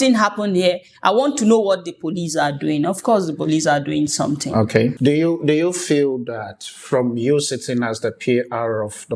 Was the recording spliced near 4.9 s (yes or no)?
yes